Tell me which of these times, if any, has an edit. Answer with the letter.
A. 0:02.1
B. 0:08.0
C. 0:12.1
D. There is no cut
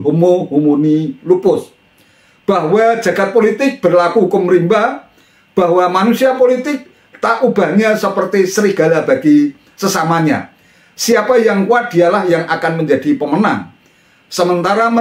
D